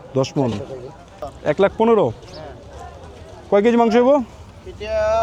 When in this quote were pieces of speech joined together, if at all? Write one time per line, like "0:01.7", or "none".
0:01.3

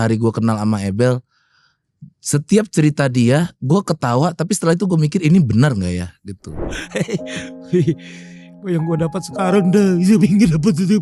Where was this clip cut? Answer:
0:06.7

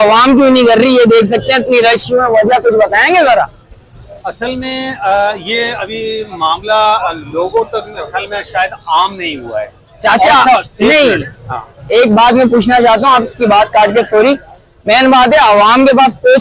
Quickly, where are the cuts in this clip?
none

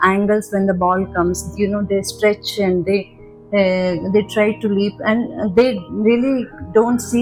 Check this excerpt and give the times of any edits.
none

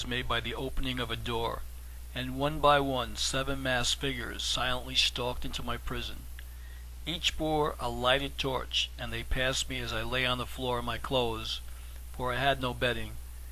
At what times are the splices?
none

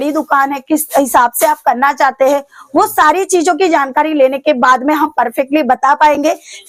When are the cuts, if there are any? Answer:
none

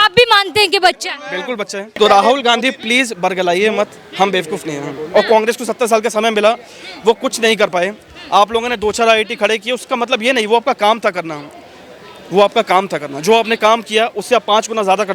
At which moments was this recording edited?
0:01.8

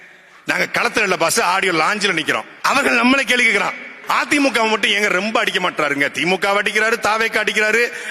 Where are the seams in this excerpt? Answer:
0:02.5
0:03.9

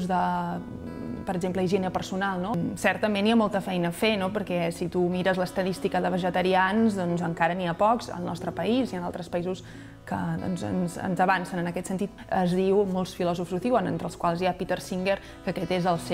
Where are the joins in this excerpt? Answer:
0:02.5
0:12.1

